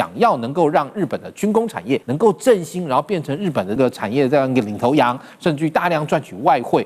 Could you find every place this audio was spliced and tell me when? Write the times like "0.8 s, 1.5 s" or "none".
2.1 s, 3.8 s